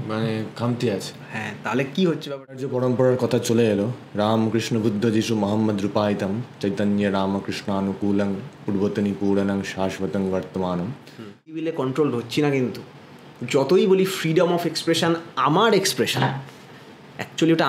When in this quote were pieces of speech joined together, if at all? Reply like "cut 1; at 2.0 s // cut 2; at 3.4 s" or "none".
cut 1; at 2.7 s // cut 2; at 11.6 s